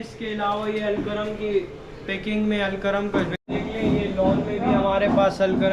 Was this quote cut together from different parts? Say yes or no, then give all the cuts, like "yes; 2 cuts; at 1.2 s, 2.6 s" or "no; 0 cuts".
yes; 1 cut; at 3.4 s